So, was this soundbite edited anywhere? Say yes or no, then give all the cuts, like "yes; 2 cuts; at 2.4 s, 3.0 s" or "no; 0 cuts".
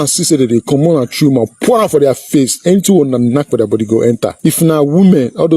yes; 1 cut; at 4.3 s